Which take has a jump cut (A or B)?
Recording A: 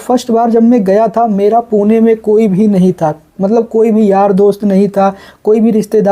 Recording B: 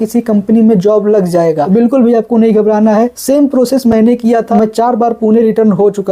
B